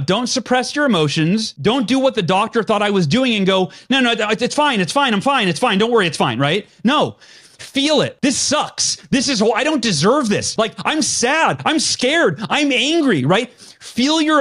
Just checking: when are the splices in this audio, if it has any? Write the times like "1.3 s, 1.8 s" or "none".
1.5 s, 8.1 s, 10.5 s